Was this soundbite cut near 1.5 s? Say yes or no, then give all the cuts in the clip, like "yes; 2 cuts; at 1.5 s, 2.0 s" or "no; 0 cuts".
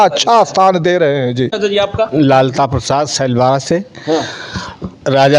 yes; 1 cut; at 1.5 s